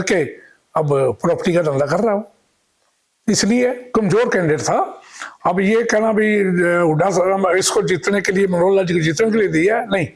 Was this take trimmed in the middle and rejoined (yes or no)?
no